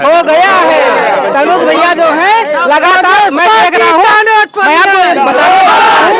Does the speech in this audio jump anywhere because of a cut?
no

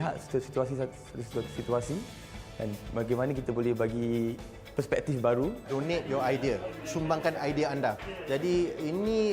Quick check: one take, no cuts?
no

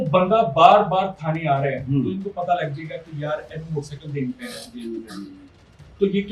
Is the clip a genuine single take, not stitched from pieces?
yes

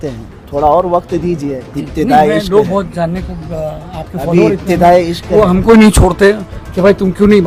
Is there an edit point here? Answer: no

